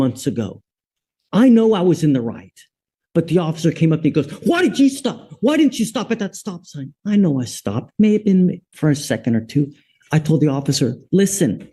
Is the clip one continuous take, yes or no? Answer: yes